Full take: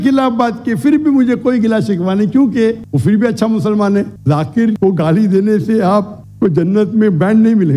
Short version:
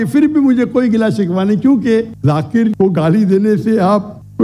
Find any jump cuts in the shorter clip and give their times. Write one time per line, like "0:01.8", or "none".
0:02.1